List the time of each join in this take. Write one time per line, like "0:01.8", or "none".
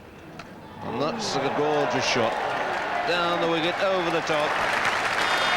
0:04.6

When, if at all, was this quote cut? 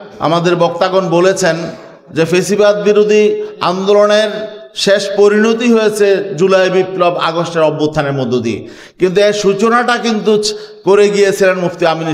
none

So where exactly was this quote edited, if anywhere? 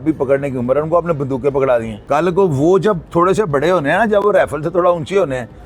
0:01.9

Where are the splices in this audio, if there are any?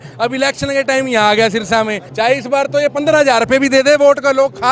0:02.1

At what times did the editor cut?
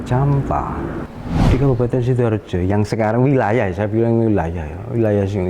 0:01.1

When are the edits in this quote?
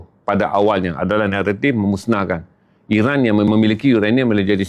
0:03.5

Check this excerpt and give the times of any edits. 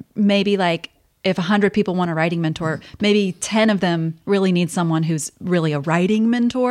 none

